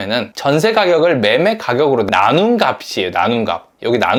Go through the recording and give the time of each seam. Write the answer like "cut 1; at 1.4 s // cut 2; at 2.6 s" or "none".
none

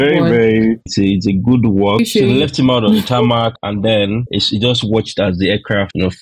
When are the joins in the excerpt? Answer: cut 1; at 2.0 s

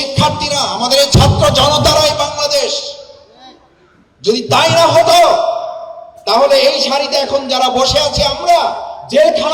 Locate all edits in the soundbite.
none

